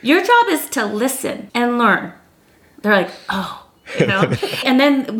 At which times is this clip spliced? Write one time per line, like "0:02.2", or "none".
0:01.4